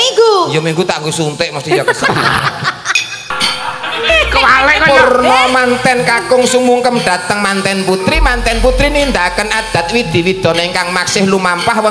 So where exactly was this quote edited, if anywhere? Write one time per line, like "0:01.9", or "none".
0:03.3